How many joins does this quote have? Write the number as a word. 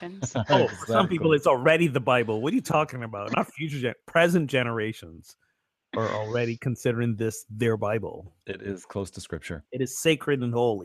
one